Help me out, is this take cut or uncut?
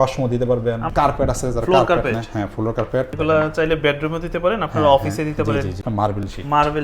cut